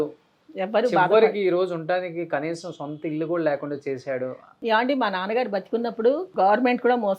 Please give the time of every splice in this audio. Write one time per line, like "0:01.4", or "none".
0:04.5
0:06.3